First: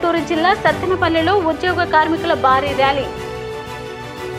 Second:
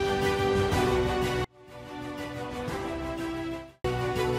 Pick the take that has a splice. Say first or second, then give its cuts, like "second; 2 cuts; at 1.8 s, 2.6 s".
second; 1 cut; at 1.4 s